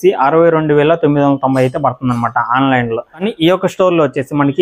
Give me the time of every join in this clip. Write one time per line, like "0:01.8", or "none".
0:03.1